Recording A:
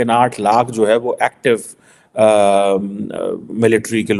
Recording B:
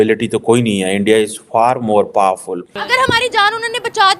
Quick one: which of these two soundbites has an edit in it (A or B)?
B